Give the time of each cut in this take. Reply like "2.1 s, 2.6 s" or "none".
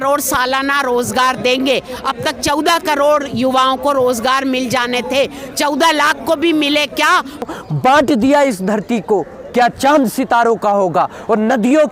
7.4 s